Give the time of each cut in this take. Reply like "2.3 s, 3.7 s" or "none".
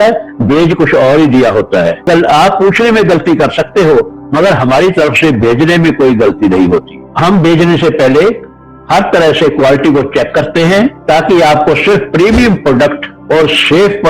2.1 s

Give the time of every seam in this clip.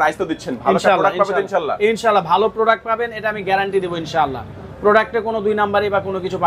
none

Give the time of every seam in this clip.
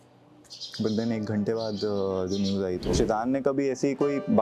2.9 s

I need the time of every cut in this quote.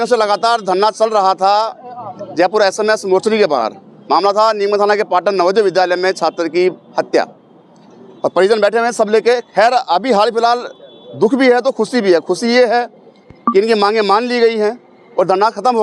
none

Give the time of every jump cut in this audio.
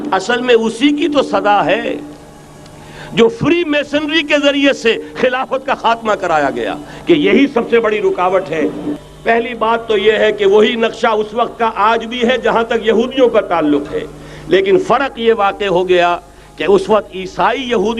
8.9 s

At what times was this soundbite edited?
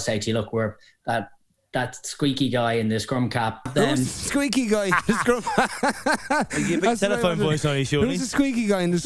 3.7 s

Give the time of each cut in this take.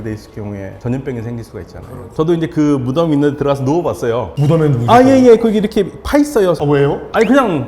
2.1 s, 6.6 s

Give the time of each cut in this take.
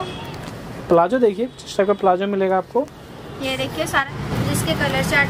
4.1 s

